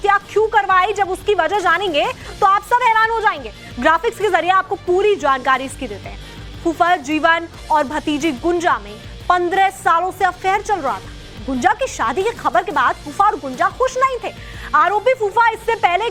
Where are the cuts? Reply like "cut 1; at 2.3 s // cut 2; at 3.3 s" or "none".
none